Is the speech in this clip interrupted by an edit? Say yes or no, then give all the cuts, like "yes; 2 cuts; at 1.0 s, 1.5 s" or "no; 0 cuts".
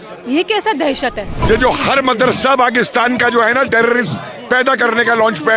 yes; 1 cut; at 1.4 s